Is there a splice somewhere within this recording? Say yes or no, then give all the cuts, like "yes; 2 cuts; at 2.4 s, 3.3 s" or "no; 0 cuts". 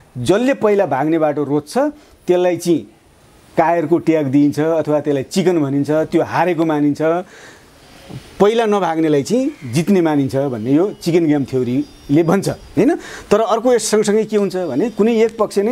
no; 0 cuts